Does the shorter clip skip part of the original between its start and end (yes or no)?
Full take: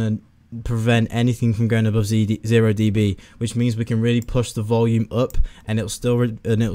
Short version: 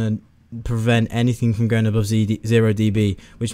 no